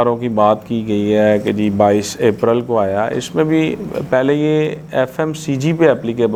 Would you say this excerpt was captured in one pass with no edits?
yes; 0 cuts

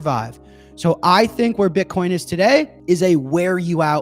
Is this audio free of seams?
no; 1 cut; at 2.7 s

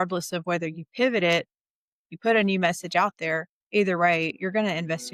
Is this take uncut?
yes; 0 cuts

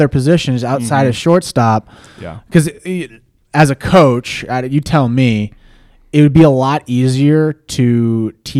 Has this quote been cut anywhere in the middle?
no; 0 cuts

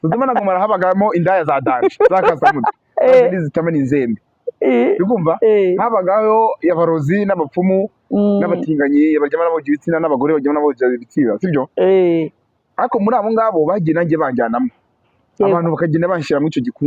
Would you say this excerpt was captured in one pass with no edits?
yes; 0 cuts

